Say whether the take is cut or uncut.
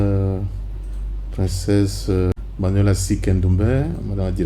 cut